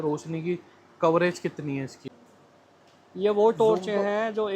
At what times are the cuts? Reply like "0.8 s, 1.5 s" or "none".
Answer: 2.0 s